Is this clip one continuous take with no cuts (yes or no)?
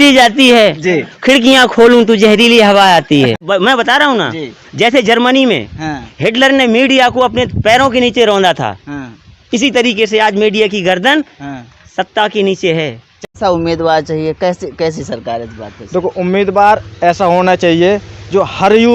no